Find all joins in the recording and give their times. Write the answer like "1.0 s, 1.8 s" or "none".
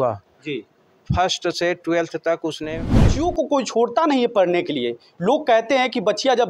3.1 s